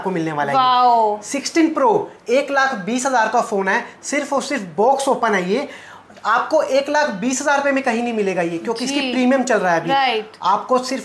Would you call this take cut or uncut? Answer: uncut